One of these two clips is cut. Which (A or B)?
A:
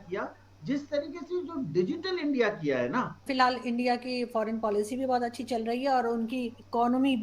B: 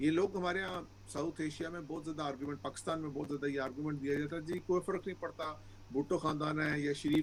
A